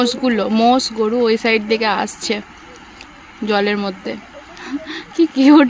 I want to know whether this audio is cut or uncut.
uncut